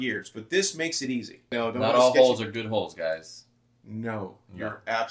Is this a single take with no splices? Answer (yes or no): no